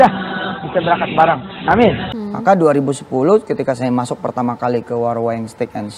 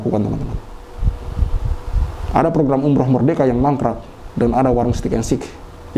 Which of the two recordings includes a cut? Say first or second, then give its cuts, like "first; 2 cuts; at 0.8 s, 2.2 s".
first; 1 cut; at 2.1 s